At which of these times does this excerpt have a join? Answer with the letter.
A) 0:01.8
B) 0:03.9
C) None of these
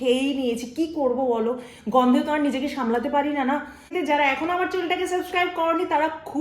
B